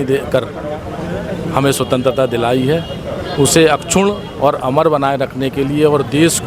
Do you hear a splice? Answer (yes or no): no